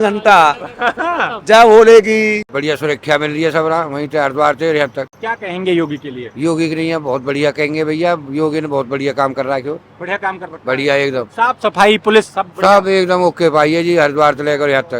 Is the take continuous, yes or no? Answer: no